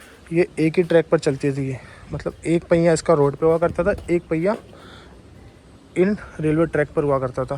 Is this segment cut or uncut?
uncut